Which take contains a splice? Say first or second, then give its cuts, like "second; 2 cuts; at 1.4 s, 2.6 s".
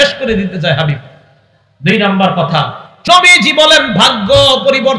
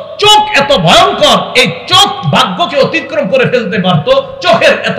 first; 1 cut; at 2.9 s